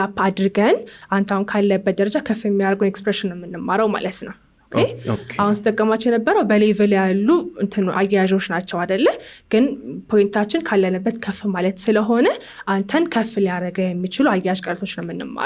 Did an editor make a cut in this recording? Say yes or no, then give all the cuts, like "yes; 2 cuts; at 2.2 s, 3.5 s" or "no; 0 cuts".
no; 0 cuts